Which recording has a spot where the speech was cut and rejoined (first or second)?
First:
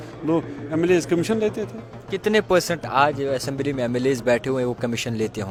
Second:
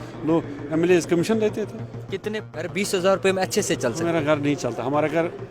second